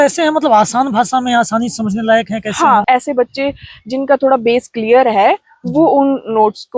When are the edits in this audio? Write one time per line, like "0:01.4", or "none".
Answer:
0:02.8